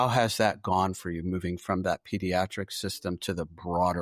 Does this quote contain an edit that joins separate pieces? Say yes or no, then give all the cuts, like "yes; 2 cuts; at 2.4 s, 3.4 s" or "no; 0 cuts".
no; 0 cuts